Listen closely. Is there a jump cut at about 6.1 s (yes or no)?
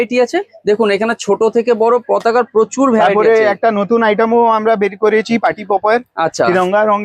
no